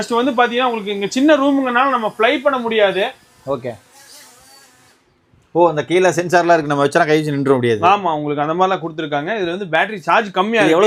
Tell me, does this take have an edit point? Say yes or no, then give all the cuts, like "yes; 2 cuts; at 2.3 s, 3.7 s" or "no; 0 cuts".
no; 0 cuts